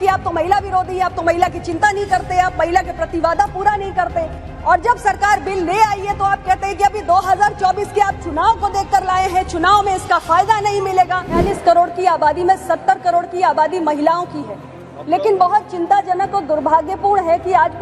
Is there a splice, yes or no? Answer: yes